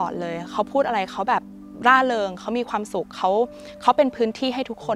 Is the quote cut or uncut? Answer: uncut